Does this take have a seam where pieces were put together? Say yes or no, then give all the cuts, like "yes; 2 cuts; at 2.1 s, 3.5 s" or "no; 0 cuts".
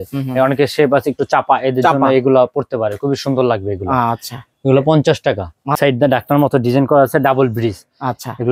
yes; 1 cut; at 5.8 s